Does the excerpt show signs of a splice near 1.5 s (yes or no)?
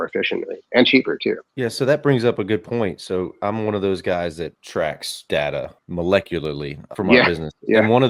no